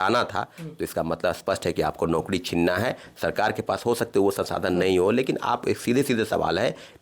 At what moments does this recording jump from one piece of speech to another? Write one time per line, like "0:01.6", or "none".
none